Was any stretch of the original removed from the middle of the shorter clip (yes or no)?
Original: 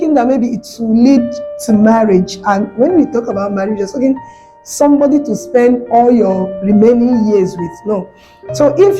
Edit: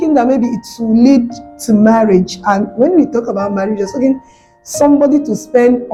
no